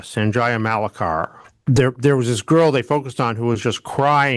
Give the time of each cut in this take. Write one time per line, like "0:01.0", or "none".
0:01.4